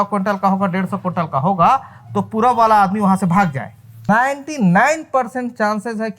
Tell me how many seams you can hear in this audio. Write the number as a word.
one